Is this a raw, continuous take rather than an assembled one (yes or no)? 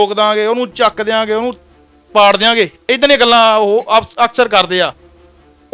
yes